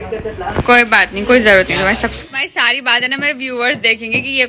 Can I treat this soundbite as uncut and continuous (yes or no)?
no